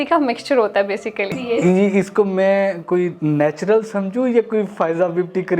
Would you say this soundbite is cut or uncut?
cut